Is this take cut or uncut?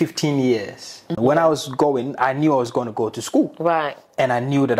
cut